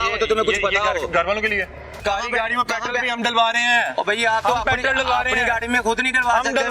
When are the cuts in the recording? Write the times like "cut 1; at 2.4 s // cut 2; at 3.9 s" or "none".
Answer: cut 1; at 2.0 s

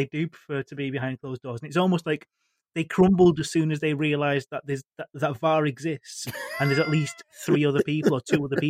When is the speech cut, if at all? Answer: none

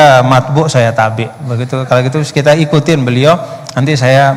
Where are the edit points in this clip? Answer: none

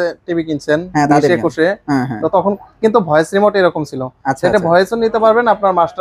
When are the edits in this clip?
none

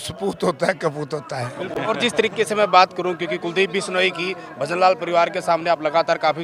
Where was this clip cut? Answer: none

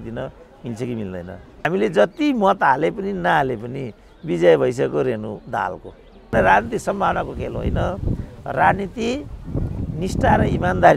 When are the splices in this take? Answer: cut 1; at 1.6 s // cut 2; at 6.3 s

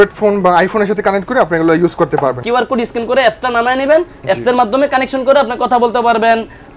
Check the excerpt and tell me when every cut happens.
cut 1; at 2.4 s

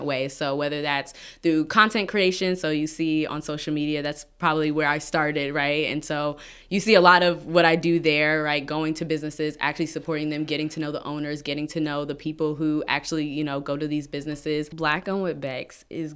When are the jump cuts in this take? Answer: cut 1; at 14.7 s

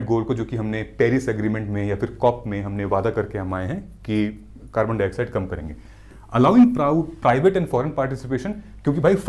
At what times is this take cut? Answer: none

